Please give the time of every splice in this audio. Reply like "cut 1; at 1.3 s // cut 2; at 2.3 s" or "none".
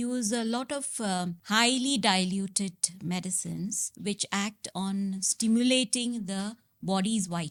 none